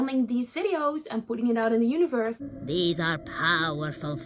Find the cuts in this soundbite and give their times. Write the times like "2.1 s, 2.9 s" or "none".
2.5 s

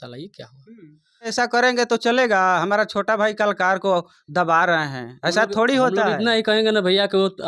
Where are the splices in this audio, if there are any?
1.3 s

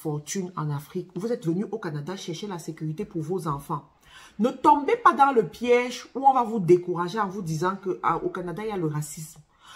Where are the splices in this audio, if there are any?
none

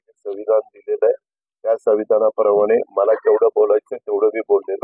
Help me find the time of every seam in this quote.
none

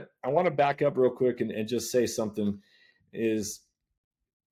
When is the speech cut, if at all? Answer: none

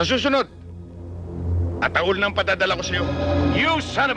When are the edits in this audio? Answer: 3.0 s

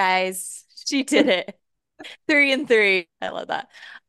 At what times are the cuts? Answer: 3.1 s

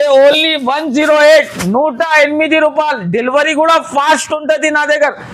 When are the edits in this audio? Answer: none

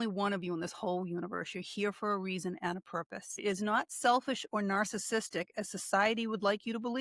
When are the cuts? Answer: 3.4 s

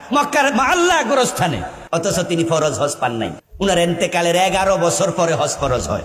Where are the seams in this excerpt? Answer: 1.7 s, 3.4 s

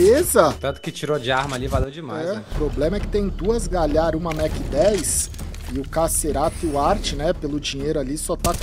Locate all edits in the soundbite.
2.6 s

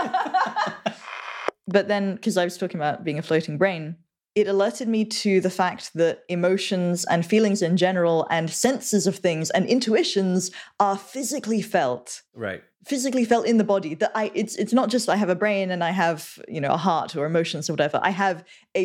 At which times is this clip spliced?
1.5 s

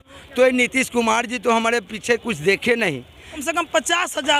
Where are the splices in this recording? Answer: 3.3 s

